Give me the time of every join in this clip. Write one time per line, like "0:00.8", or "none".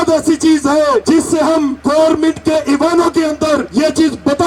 0:01.4
0:03.7